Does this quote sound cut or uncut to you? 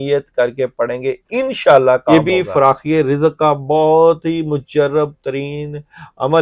cut